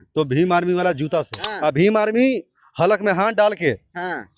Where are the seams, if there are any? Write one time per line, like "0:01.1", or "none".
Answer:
0:01.4